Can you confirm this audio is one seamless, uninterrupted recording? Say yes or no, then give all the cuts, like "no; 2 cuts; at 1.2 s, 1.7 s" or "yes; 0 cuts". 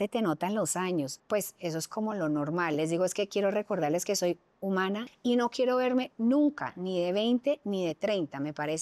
no; 2 cuts; at 1.2 s, 5.1 s